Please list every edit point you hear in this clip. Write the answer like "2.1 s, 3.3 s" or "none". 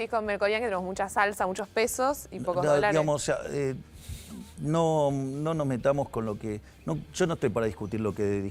none